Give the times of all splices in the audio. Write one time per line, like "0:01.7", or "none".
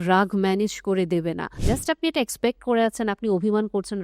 0:01.5